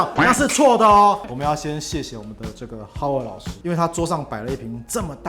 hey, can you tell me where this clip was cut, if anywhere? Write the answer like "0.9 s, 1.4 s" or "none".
1.2 s